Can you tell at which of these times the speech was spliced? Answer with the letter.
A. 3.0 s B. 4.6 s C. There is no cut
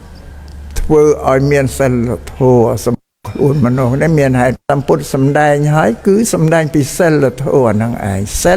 B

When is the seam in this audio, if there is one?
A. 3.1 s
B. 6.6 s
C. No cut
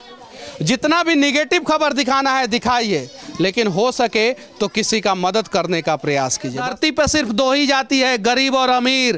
B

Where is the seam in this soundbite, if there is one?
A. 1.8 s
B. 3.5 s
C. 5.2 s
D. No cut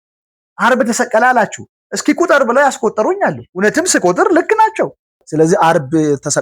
C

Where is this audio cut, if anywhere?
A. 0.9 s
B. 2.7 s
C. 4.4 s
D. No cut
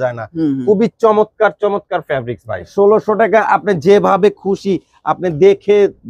B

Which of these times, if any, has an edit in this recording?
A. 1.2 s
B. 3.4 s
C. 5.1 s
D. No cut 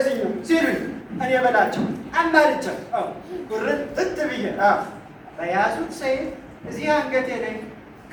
D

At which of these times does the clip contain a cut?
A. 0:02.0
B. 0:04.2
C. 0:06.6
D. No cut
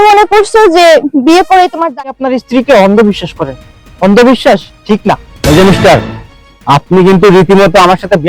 A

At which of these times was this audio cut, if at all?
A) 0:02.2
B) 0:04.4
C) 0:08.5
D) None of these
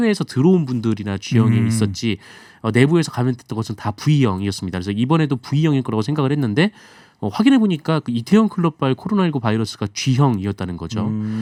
D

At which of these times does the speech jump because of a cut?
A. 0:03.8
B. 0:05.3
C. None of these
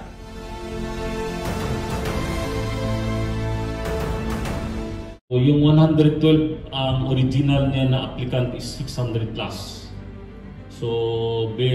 B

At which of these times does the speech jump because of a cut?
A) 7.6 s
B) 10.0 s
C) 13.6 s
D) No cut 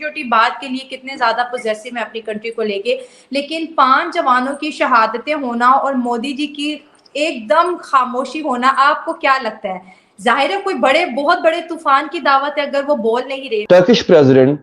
C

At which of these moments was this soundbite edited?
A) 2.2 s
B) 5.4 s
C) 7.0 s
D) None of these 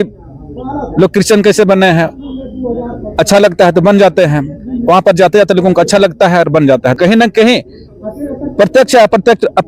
C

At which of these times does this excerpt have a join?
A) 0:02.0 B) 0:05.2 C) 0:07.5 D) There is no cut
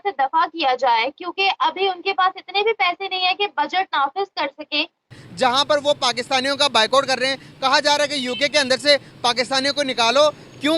B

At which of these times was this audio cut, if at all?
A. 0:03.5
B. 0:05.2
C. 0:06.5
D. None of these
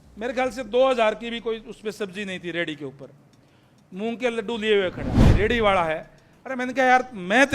B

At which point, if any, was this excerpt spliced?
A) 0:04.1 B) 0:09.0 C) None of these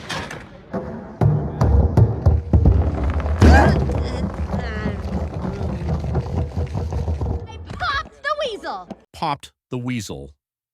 B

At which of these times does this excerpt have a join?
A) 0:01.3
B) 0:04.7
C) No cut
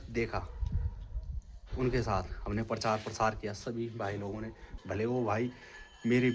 B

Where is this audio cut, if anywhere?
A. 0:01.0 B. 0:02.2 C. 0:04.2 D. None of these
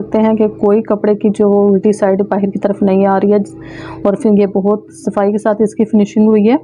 D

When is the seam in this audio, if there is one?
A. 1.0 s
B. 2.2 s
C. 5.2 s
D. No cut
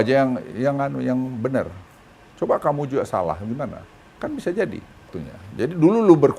C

